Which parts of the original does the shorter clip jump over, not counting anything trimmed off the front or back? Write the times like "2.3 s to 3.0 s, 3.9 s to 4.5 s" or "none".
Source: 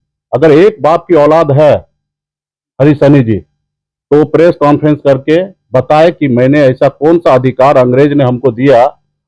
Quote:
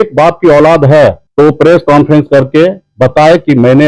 1.9 s to 4.0 s